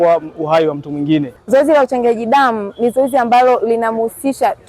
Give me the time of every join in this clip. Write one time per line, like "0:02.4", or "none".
0:01.4